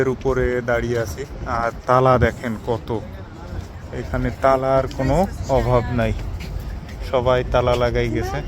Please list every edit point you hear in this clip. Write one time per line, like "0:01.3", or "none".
none